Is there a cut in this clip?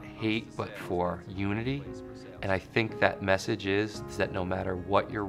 no; 0 cuts

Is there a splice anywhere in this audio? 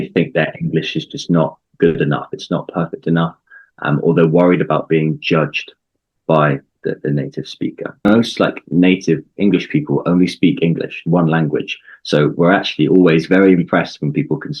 yes; 1 cut; at 8.1 s

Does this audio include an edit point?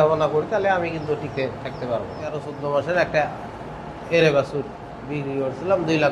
yes; 1 cut; at 2.5 s

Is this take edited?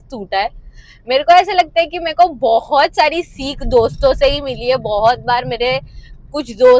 no; 0 cuts

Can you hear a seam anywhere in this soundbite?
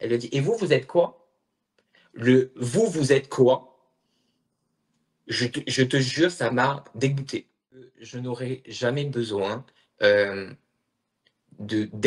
yes; 1 cut; at 7.9 s

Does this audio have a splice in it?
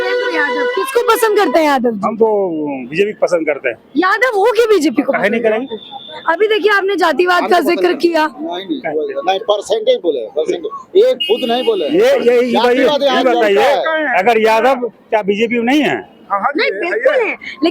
no; 0 cuts

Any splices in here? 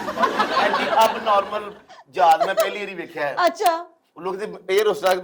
no; 0 cuts

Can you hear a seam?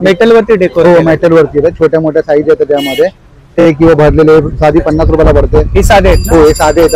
yes; 1 cut; at 3.6 s

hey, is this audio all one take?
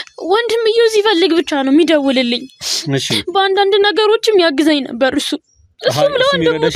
yes; 0 cuts

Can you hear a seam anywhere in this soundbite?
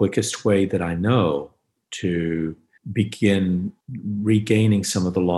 no; 0 cuts

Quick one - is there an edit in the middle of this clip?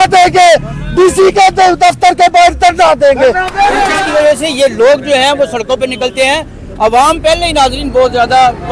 yes; 1 cut; at 4.0 s

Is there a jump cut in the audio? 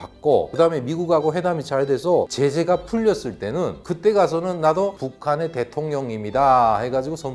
no; 0 cuts

